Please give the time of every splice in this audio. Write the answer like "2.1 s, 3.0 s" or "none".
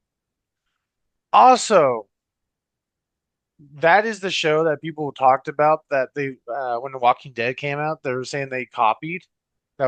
none